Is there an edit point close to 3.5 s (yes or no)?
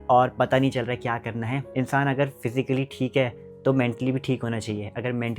no